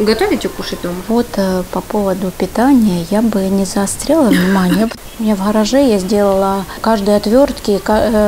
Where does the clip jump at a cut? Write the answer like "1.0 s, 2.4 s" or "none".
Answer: 0.9 s, 4.9 s, 6.8 s